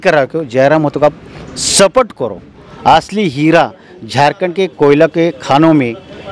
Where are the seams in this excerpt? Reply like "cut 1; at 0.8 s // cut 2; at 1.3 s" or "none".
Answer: cut 1; at 2.7 s